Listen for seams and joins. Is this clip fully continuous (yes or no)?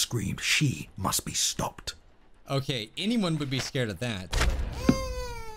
yes